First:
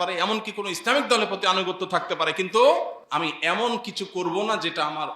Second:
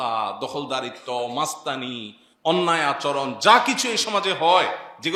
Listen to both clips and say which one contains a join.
first; 1 cut; at 3.0 s

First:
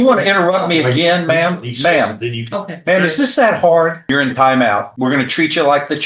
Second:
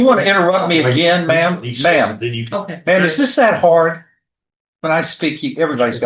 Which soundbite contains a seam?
first; 2 cuts; at 4.0 s, 4.9 s

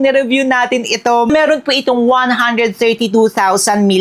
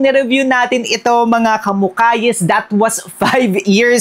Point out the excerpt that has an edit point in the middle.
first; 1 cut; at 1.3 s

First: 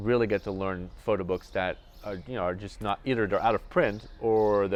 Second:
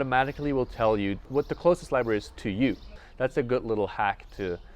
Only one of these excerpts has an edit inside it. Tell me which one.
second; 2 cuts; at 1.3 s, 3.0 s

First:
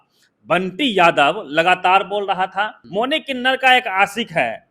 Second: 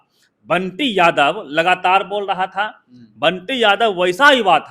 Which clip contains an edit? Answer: first; 1 cut; at 2.8 s

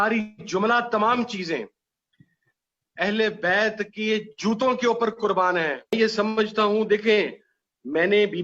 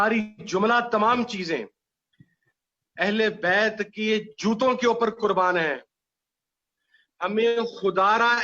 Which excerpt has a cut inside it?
first; 1 cut; at 5.8 s

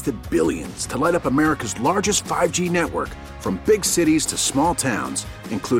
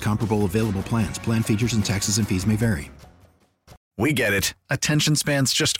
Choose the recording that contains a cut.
second; 1 cut; at 3.8 s

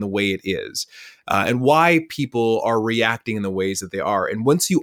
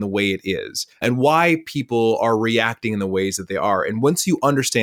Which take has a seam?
second; 1 cut; at 1.0 s

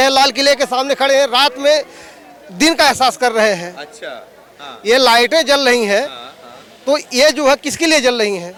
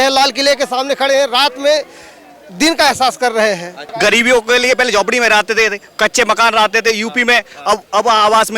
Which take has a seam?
second; 1 cut; at 3.9 s

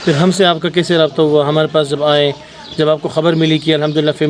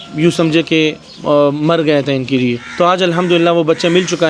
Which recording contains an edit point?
second; 2 cuts; at 1.1 s, 2.6 s

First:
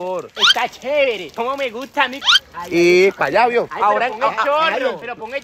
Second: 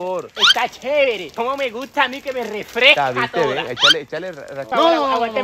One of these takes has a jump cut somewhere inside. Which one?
first; 1 cut; at 2.3 s

